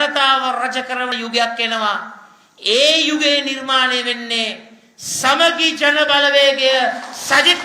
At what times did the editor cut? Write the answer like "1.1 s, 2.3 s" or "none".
1.1 s